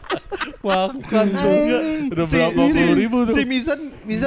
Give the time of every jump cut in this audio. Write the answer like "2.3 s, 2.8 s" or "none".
none